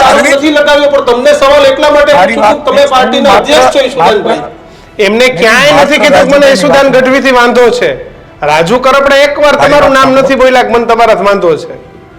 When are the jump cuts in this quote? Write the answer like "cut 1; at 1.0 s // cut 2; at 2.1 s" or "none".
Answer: none